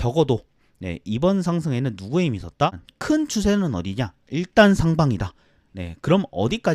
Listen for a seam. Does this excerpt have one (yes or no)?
yes